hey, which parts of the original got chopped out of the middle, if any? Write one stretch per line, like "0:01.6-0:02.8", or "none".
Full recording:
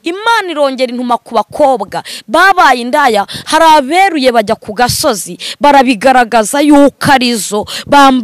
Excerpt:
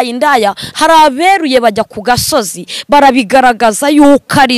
none

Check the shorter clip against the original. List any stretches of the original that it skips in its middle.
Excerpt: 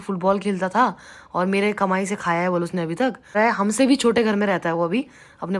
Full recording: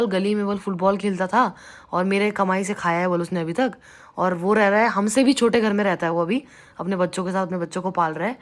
0:03.9-0:04.7

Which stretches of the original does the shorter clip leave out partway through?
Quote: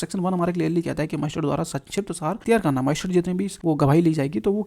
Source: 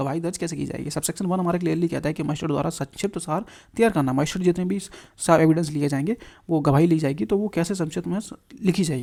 0:03.5-0:03.7
0:04.8-0:06.4

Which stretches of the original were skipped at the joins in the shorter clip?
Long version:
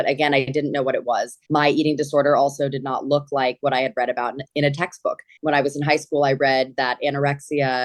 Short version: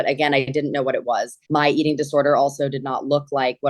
none

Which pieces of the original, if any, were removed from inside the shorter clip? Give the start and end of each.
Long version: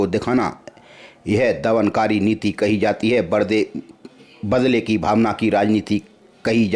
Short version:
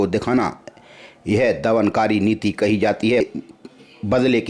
0:03.2-0:03.6

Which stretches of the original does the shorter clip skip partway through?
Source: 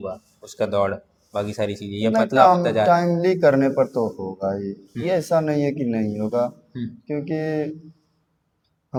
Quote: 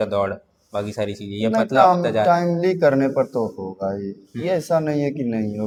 none

